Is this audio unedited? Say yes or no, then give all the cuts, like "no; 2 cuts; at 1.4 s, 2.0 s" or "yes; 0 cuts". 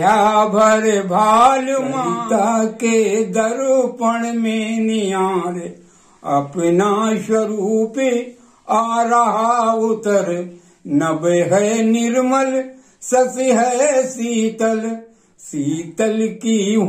yes; 0 cuts